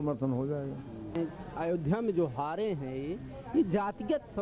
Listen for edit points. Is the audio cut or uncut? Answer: cut